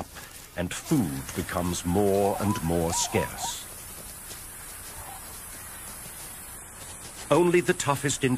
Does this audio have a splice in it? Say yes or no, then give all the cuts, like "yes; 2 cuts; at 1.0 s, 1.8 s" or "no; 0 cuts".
no; 0 cuts